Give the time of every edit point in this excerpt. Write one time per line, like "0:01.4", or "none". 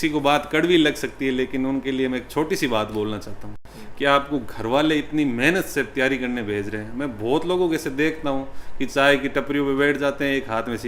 none